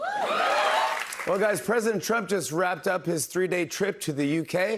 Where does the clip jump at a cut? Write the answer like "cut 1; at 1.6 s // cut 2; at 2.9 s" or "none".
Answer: cut 1; at 0.9 s

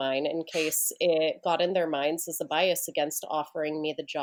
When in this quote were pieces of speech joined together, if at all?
none

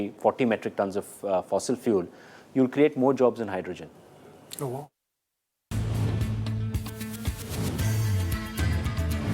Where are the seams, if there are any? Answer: cut 1; at 5.0 s // cut 2; at 8.5 s

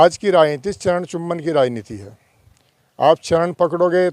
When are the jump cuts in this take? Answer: none

